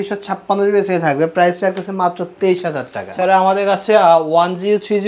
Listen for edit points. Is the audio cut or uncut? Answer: cut